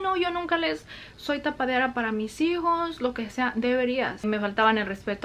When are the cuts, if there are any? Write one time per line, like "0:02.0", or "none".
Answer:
0:04.2